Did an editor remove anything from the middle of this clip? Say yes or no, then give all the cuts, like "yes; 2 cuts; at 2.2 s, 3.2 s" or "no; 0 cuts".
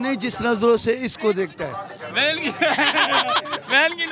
no; 0 cuts